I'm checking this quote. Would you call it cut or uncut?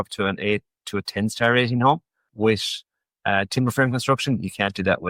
cut